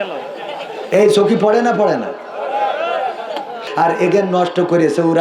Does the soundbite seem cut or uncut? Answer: cut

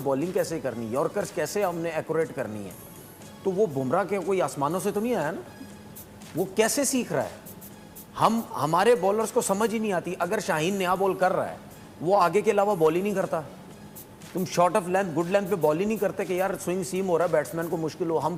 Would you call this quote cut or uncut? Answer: uncut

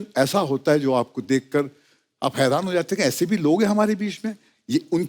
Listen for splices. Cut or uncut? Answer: uncut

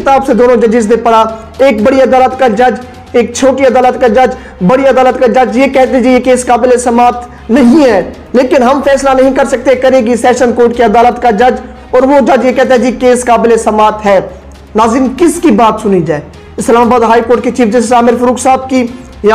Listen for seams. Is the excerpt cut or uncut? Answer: uncut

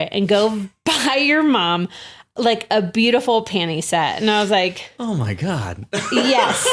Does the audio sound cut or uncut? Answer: uncut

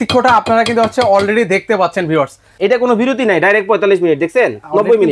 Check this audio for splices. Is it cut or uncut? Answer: cut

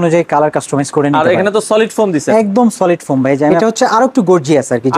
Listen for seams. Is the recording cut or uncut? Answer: cut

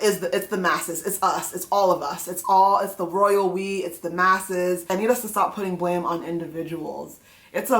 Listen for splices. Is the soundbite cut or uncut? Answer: cut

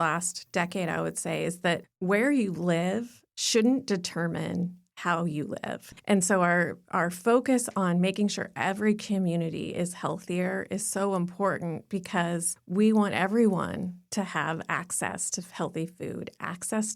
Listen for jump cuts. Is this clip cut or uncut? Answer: cut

